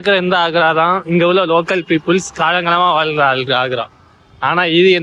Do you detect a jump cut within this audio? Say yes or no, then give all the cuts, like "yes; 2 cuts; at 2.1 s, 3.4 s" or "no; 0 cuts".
no; 0 cuts